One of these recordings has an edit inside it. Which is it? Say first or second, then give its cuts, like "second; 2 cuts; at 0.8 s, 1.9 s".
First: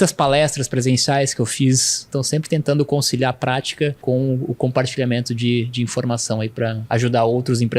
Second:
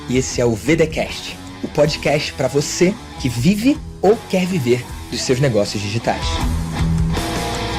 first; 3 cuts; at 2.1 s, 4.0 s, 6.8 s